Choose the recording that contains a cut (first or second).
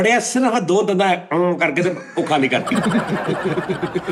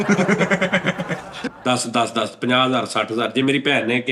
second